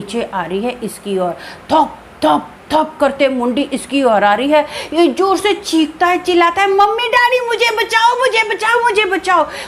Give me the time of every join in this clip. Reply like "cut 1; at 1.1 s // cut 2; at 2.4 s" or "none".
none